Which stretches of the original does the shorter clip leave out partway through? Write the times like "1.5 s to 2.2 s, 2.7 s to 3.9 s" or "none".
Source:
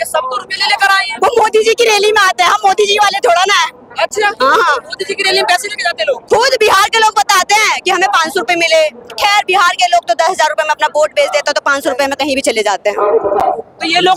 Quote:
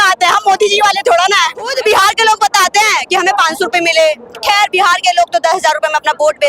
3.9 s to 6.5 s